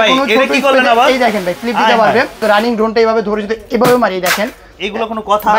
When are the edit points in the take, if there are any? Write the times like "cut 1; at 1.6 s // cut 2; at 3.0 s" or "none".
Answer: cut 1; at 2.4 s